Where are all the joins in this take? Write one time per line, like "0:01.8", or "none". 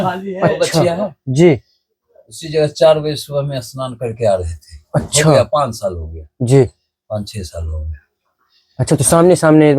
none